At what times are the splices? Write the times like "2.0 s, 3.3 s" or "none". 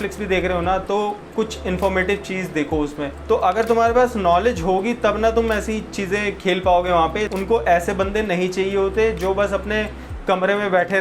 3.1 s, 7.3 s